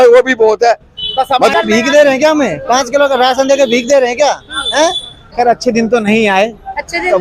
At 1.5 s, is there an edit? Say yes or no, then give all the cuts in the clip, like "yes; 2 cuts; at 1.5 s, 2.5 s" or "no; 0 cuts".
yes; 2 cuts; at 1.5 s, 5.2 s